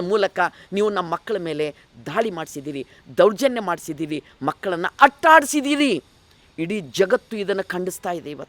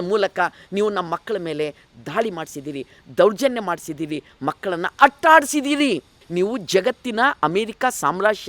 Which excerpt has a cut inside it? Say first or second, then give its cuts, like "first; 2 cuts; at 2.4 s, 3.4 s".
second; 1 cut; at 6.2 s